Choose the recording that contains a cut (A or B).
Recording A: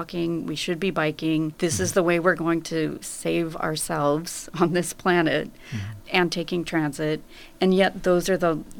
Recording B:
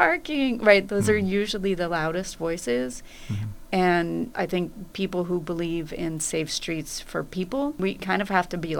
B